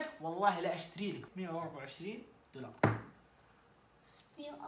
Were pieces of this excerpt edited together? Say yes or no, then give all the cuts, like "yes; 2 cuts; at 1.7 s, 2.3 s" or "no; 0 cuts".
yes; 1 cut; at 1.2 s